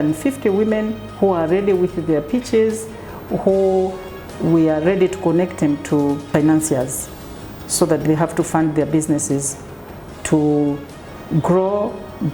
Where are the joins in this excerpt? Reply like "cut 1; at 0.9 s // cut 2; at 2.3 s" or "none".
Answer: cut 1; at 6.3 s

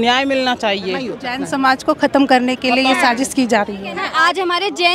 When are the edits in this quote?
cut 1; at 1.2 s // cut 2; at 4.0 s

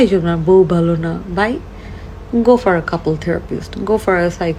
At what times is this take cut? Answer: none

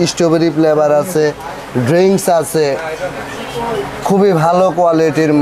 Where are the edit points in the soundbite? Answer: none

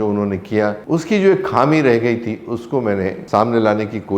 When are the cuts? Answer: cut 1; at 0.8 s // cut 2; at 3.2 s

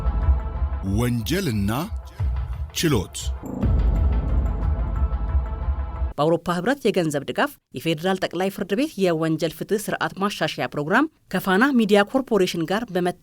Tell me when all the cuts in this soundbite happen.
cut 1; at 0.8 s // cut 2; at 3.3 s // cut 3; at 6.1 s

